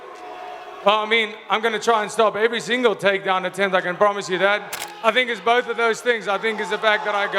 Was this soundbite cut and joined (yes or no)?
yes